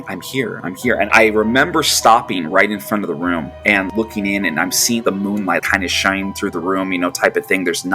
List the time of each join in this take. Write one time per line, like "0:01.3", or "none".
0:01.1
0:03.5